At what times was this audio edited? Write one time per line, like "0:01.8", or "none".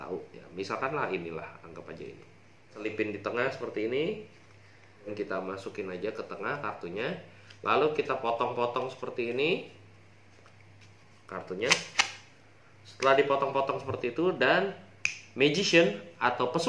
0:02.8
0:05.1